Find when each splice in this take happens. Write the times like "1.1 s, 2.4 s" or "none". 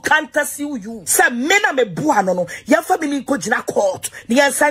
1.0 s